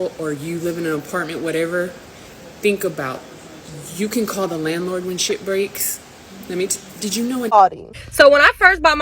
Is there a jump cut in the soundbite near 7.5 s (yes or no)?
yes